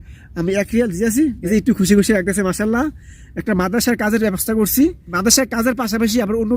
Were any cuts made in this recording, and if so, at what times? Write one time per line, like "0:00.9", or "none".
0:01.4
0:05.1